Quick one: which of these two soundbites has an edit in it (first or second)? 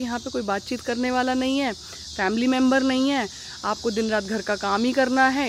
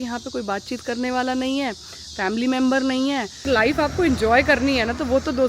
second